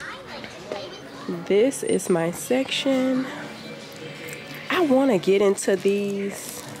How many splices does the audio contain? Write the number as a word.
one